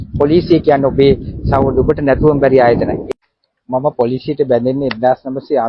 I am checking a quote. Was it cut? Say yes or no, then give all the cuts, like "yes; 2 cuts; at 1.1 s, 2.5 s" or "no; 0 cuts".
yes; 1 cut; at 3.0 s